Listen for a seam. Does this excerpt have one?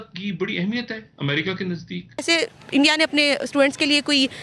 yes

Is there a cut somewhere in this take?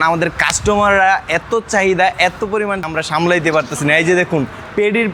yes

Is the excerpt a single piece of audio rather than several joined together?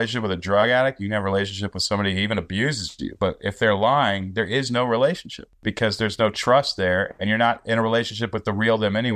no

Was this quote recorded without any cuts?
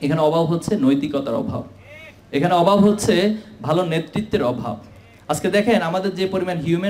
yes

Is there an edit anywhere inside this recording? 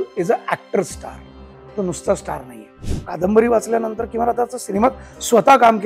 yes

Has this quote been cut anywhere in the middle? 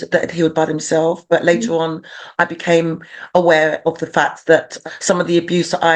yes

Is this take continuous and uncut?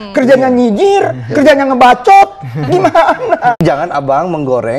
no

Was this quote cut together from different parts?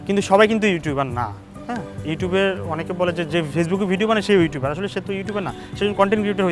no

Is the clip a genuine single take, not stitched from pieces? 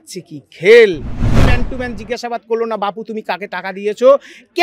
no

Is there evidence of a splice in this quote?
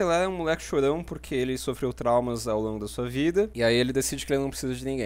yes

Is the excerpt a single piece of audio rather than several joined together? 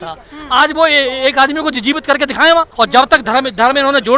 no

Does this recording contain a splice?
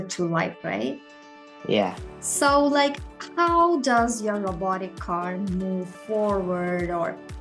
no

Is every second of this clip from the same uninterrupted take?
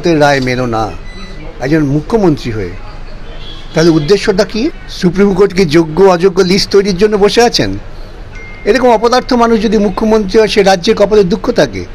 no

